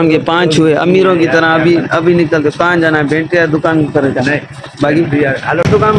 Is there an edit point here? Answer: no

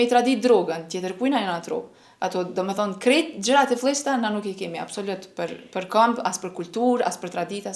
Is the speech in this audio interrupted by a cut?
no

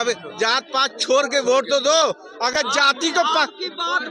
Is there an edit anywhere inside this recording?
no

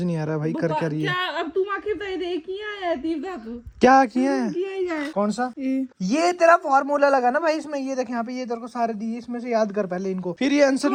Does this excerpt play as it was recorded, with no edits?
yes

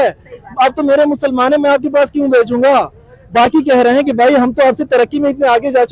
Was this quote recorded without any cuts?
yes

